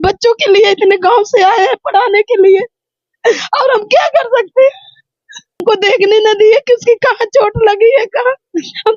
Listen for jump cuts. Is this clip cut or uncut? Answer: cut